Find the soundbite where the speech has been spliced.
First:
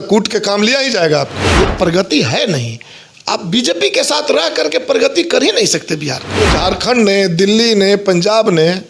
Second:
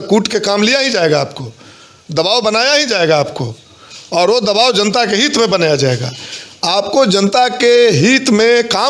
first; 2 cuts; at 1.4 s, 6.2 s

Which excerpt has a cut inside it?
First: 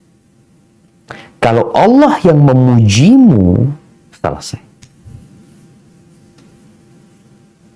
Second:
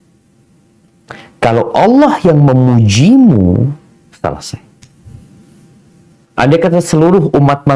second; 1 cut; at 6.1 s

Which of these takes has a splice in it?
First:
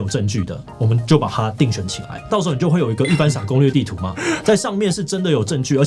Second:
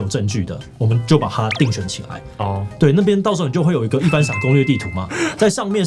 first; 1 cut; at 2.3 s

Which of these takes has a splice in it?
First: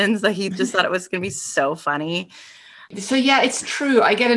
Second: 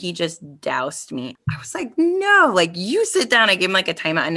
first; 1 cut; at 2.8 s

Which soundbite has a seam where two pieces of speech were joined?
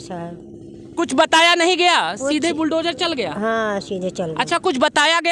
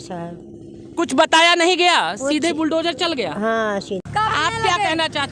second; 1 cut; at 4.0 s

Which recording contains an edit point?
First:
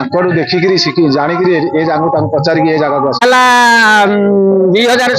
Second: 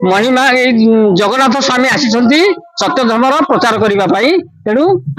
first; 1 cut; at 3.2 s

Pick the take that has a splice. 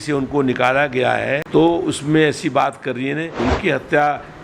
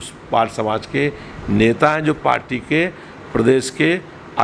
first; 2 cuts; at 1.4 s, 3.3 s

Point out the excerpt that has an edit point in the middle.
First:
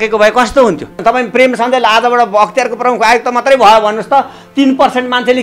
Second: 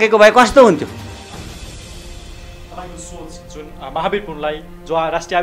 first; 1 cut; at 1.0 s

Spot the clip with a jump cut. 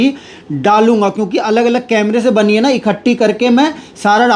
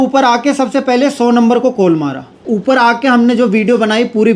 second; 1 cut; at 2.4 s

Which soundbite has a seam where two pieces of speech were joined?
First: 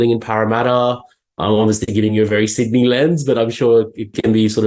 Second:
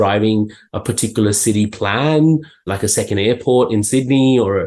second; 1 cut; at 2.7 s

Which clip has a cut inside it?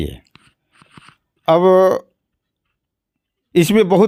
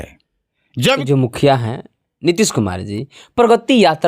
second; 1 cut; at 1.0 s

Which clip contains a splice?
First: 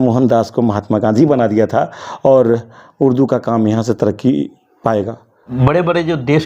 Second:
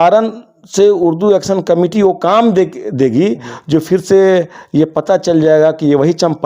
first; 1 cut; at 5.5 s

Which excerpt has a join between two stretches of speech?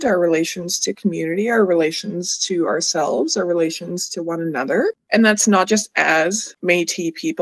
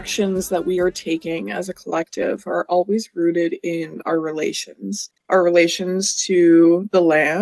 first; 1 cut; at 5.0 s

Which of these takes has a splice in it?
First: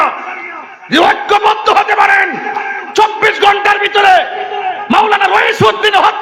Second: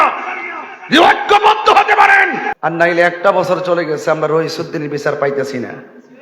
second; 1 cut; at 2.5 s

